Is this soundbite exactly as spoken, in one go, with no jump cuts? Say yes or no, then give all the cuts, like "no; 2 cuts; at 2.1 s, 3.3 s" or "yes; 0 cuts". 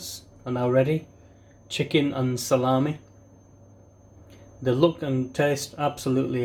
yes; 0 cuts